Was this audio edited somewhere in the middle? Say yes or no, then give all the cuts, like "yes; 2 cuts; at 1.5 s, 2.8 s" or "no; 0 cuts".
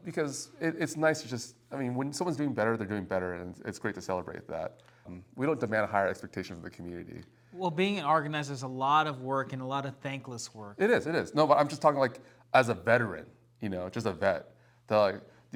no; 0 cuts